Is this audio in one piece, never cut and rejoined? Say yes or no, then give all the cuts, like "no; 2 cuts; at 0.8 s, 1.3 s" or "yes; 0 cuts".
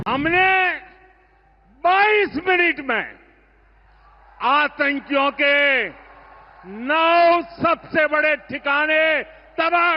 yes; 0 cuts